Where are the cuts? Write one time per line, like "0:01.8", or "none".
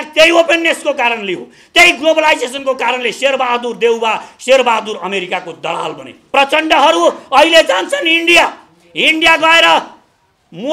0:06.1